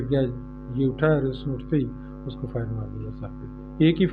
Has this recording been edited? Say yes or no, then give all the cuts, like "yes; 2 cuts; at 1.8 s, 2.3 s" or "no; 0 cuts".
no; 0 cuts